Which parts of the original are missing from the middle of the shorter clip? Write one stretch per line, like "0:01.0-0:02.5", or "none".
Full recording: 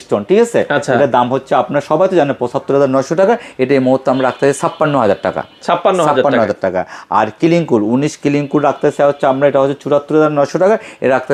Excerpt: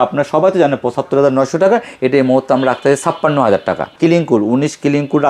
0:05.5-0:07.3